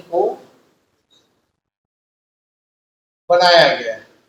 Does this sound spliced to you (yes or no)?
no